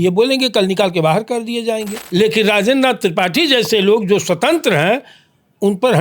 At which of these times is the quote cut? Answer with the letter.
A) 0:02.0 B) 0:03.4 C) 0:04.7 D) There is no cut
A